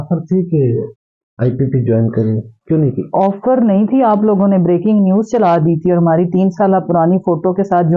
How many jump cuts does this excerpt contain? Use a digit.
0